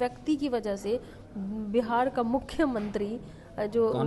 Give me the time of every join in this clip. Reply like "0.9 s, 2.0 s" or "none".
none